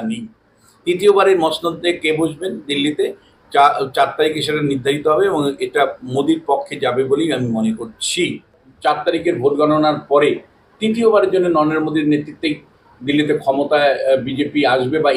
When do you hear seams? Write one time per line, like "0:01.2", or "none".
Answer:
0:08.6